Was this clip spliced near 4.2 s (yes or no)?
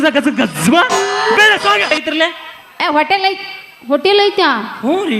no